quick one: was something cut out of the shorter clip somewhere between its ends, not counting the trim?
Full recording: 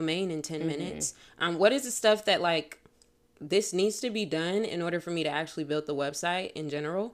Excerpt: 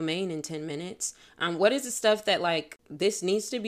yes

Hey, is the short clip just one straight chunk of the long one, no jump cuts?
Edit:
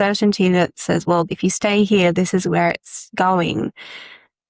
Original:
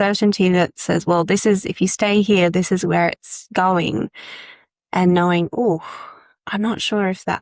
no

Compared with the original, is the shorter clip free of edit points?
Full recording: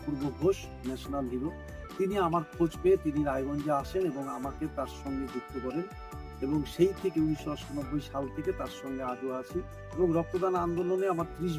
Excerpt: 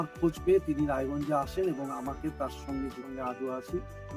no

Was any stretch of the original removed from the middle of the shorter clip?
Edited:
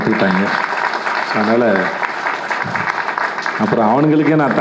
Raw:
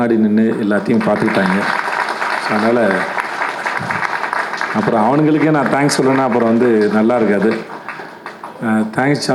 no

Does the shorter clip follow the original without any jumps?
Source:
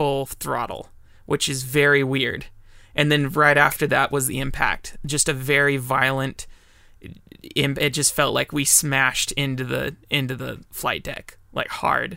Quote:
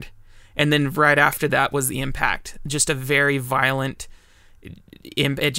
yes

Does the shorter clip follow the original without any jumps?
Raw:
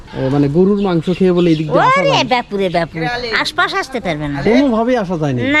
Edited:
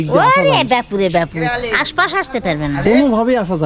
yes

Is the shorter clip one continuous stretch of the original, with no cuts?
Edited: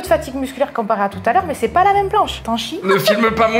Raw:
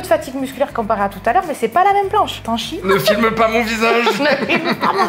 yes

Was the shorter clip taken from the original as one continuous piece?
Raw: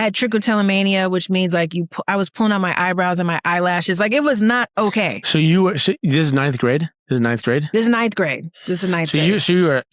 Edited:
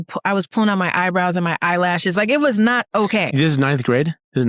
no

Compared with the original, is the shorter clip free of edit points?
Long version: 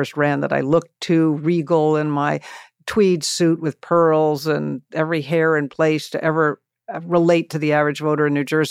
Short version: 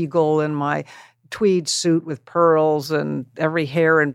yes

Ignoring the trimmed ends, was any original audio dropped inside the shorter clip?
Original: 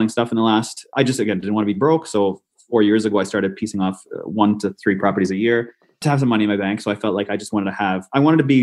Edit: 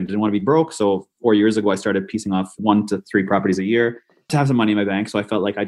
yes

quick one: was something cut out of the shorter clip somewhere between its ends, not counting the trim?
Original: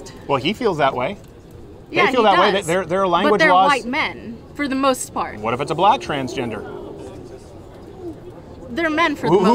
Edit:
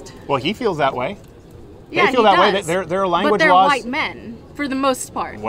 no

